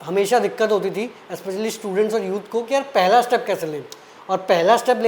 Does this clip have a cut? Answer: no; 0 cuts

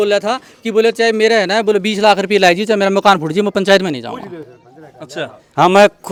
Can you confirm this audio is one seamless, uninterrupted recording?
yes; 0 cuts

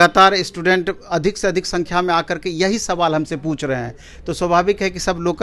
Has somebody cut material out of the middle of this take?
no; 0 cuts

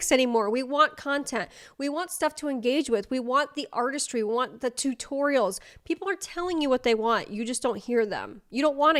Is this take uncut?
yes; 0 cuts

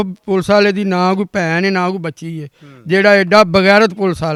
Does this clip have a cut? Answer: no; 0 cuts

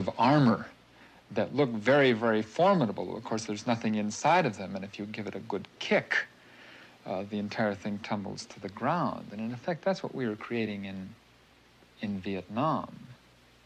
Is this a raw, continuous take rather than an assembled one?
yes; 0 cuts

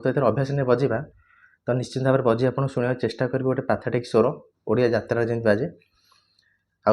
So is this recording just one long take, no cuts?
yes; 0 cuts

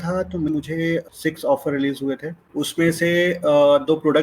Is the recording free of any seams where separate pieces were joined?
no; 2 cuts; at 0.7 s, 2.4 s

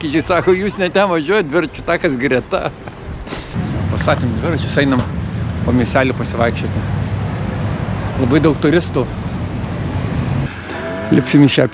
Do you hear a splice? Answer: yes; 2 cuts; at 3.5 s, 10.5 s

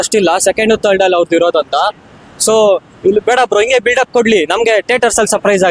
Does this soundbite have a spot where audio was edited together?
no; 0 cuts

